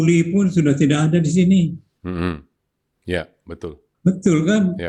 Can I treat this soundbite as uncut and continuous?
no; 1 cut; at 3.9 s

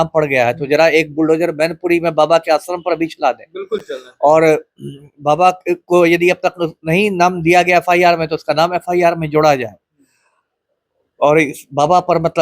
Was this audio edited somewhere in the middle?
no; 0 cuts

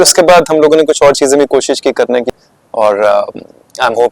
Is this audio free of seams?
no; 1 cut; at 2.3 s

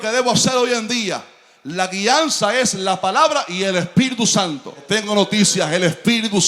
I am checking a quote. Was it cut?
yes; 1 cut; at 4.8 s

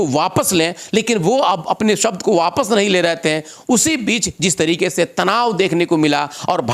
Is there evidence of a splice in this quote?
no; 0 cuts

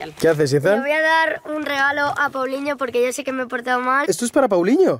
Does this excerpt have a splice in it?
yes; 1 cut; at 4.0 s

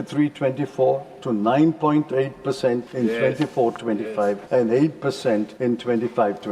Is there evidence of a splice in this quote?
yes; 3 cuts; at 2.9 s, 4.4 s, 5.5 s

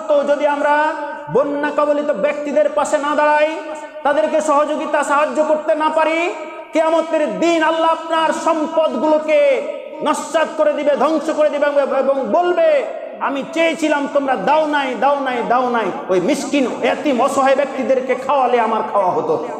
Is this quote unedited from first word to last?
yes; 0 cuts

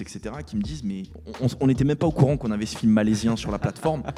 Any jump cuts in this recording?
no; 0 cuts

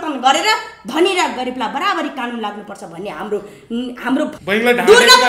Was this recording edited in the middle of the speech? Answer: yes; 1 cut; at 4.3 s

